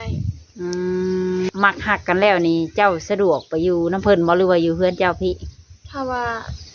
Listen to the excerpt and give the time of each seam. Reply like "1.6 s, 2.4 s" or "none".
1.5 s